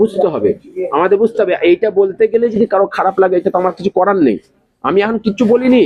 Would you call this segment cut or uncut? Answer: uncut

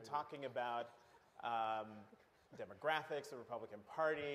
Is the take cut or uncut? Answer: uncut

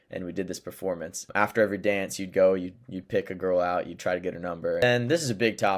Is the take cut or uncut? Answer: cut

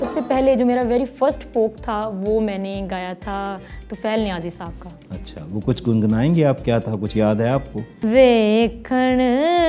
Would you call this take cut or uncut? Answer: cut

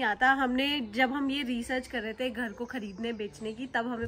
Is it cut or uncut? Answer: uncut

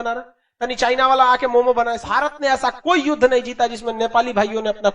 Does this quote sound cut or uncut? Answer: cut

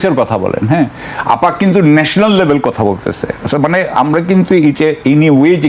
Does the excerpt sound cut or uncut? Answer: uncut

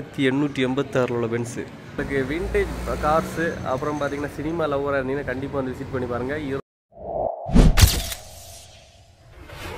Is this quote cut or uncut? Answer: cut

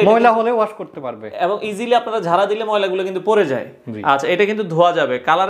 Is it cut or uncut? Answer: uncut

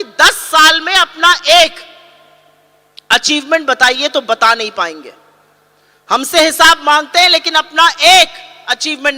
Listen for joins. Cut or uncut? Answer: uncut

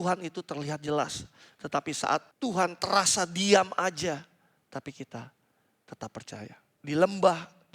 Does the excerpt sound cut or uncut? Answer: cut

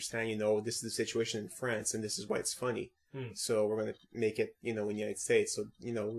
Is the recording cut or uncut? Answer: cut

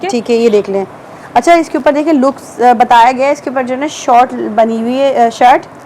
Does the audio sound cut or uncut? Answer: uncut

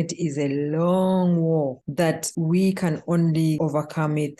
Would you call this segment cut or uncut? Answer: cut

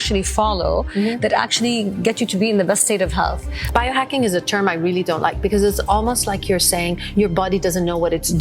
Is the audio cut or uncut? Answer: cut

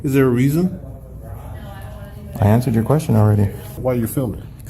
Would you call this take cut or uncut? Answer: cut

